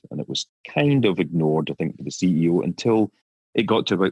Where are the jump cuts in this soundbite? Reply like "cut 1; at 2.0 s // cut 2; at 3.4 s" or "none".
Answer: none